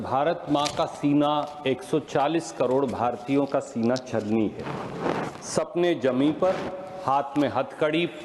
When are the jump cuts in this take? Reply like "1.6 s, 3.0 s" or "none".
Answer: none